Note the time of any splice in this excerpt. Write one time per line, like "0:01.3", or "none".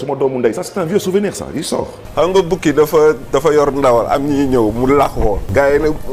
0:02.0